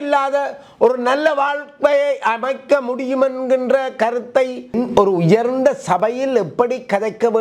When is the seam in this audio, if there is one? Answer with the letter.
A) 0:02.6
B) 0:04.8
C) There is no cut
B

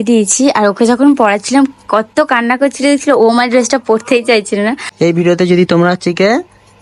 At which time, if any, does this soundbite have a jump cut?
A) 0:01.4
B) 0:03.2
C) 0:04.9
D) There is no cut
C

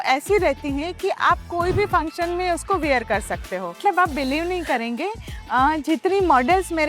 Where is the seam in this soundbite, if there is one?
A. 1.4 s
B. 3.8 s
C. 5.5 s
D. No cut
B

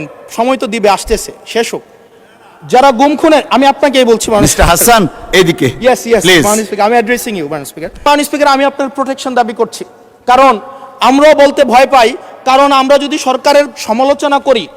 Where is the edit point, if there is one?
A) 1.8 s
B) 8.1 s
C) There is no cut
B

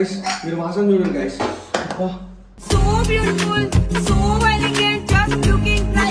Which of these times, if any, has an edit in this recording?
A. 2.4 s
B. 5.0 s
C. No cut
C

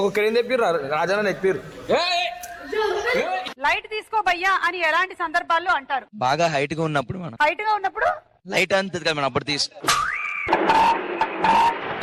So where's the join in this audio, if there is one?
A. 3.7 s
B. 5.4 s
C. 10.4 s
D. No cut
D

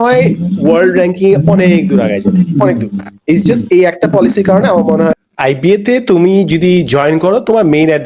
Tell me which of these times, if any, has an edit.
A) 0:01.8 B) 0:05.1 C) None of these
B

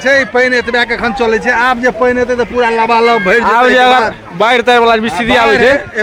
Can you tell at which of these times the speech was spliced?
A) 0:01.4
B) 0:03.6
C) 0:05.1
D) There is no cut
D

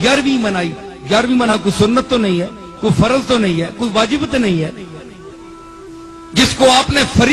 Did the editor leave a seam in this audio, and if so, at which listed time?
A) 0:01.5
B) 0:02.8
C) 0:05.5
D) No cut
A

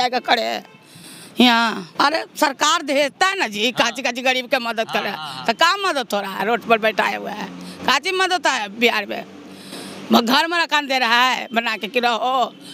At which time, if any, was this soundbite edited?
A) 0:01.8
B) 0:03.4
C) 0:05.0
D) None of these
A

